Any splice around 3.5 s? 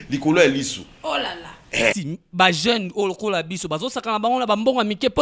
no; 1 cut; at 2.0 s

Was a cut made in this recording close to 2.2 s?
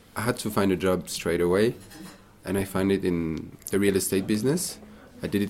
no; 1 cut; at 3.5 s

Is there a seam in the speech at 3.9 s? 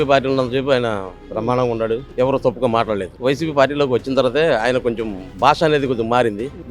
no; 1 cut; at 2.1 s

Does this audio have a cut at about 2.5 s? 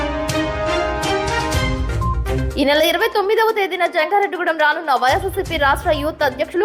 no; 0 cuts

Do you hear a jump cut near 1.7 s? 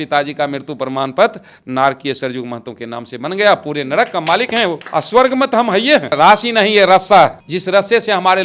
no; 3 cuts; at 4.8 s, 6.1 s, 7.5 s

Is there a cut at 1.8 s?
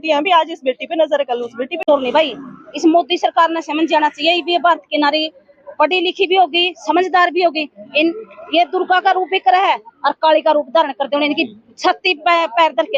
yes; 1 cut; at 1.8 s

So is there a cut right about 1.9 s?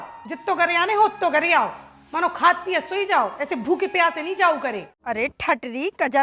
no; 1 cut; at 4.9 s

